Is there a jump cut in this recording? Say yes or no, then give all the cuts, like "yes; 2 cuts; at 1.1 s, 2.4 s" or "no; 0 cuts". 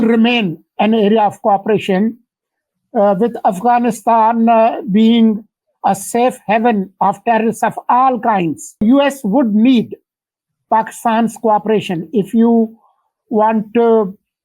yes; 1 cut; at 8.8 s